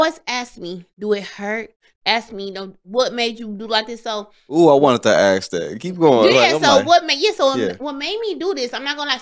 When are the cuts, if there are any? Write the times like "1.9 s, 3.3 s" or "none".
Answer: none